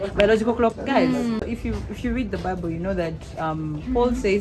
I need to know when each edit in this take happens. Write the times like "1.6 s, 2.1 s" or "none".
1.4 s